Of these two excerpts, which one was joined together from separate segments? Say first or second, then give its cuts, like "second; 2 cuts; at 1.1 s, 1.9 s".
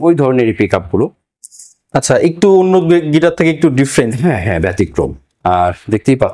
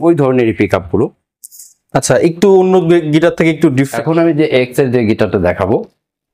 second; 1 cut; at 3.9 s